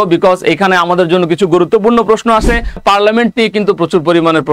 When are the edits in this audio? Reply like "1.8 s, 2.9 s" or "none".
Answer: 2.8 s